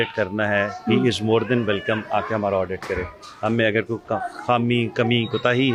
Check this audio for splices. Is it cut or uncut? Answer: uncut